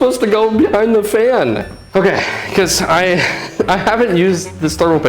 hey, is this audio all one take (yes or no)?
no